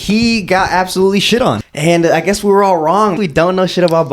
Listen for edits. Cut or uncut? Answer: cut